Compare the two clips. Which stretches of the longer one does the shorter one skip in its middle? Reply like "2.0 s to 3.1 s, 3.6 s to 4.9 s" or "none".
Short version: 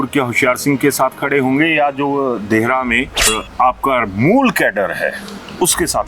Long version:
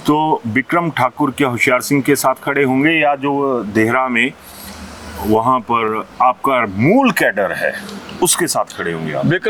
4.6 s to 6.0 s